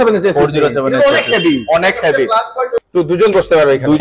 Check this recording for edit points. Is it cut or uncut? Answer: cut